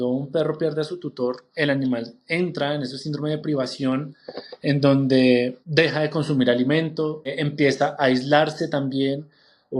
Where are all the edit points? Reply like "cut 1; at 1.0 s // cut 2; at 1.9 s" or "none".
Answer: cut 1; at 1.5 s // cut 2; at 5.6 s // cut 3; at 7.3 s